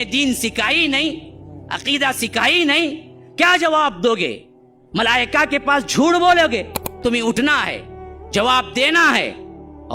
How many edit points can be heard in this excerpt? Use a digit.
1